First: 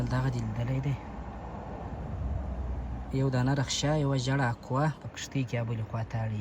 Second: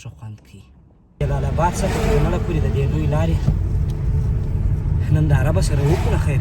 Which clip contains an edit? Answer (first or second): second